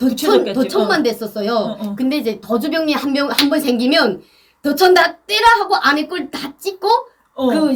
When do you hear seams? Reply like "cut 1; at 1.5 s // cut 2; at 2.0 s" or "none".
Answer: none